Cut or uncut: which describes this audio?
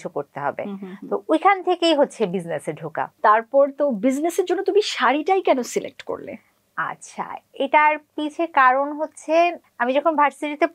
uncut